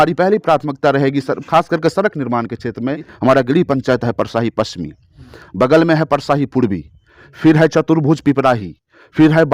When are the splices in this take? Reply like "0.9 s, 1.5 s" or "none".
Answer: 3.1 s